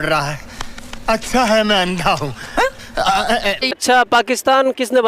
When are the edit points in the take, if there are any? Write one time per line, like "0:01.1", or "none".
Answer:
0:03.8